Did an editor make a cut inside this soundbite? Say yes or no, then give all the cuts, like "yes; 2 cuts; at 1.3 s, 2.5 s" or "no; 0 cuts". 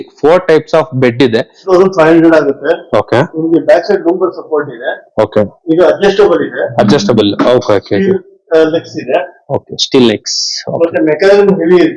yes; 1 cut; at 1.7 s